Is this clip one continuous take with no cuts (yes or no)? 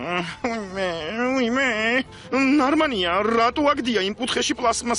yes